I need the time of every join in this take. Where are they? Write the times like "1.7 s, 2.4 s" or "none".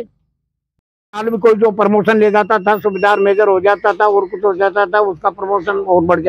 1.0 s